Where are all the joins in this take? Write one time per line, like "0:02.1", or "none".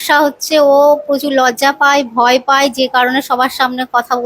none